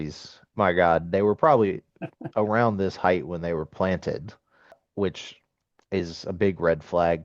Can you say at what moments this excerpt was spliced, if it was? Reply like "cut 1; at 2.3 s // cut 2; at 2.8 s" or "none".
cut 1; at 4.8 s